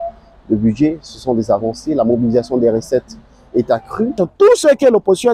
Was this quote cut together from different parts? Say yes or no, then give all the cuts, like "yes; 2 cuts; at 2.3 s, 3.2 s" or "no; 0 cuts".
yes; 1 cut; at 4.2 s